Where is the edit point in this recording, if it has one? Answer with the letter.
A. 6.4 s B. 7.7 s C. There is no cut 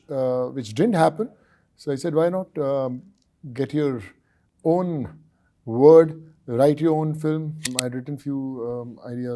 B